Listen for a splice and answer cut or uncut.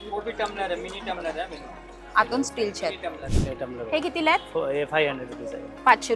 uncut